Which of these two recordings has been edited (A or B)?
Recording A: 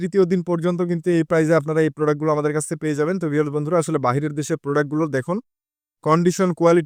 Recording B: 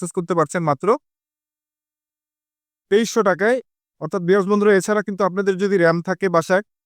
B